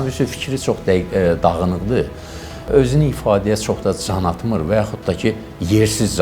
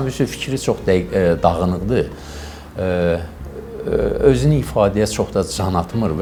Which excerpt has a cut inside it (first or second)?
first